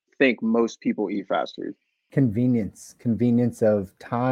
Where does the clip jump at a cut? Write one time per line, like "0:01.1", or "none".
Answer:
none